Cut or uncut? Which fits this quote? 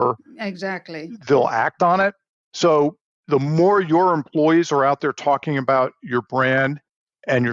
cut